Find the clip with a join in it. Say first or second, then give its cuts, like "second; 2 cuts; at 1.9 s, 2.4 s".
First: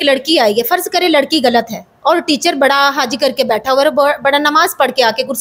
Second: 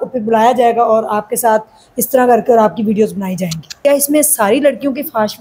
second; 1 cut; at 3.8 s